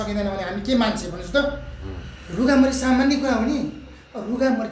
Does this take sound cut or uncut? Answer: uncut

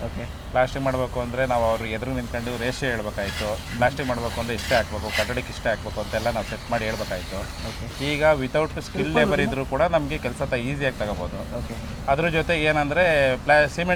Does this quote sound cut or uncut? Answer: uncut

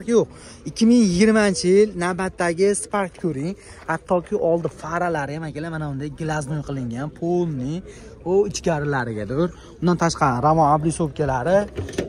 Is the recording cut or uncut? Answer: uncut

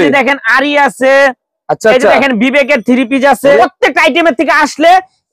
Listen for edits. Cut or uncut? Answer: cut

